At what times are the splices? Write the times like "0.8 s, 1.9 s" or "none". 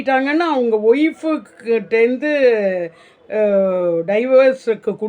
none